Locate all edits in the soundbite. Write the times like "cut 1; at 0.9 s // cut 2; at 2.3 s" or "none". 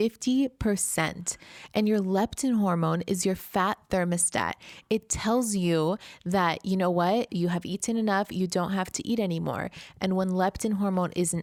none